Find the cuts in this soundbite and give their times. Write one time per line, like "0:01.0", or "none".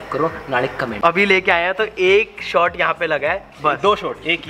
0:01.0